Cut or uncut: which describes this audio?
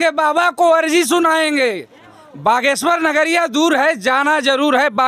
uncut